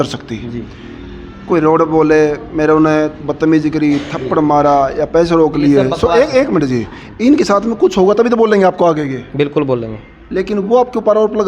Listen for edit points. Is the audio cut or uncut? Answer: uncut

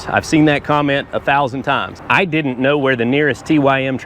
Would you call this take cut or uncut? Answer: cut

